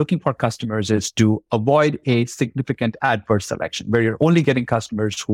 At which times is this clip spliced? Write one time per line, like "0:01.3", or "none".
none